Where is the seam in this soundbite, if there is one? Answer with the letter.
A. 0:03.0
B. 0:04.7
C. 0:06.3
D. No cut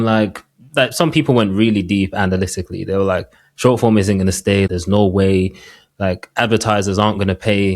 B